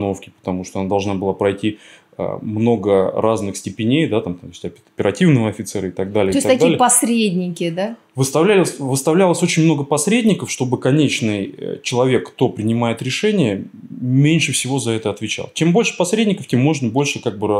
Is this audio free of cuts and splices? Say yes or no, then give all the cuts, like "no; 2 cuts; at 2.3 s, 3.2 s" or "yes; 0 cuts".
yes; 0 cuts